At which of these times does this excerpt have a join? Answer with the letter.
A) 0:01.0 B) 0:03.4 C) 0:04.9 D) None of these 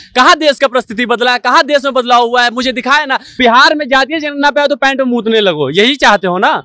B